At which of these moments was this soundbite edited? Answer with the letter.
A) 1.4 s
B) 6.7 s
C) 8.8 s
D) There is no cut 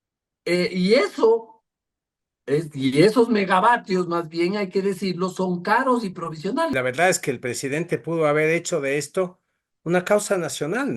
B